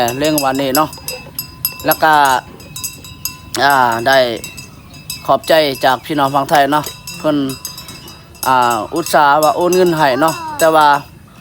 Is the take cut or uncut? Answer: uncut